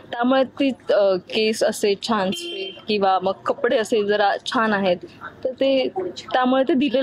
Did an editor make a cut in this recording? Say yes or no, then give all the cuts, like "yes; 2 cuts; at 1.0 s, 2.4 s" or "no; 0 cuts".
no; 0 cuts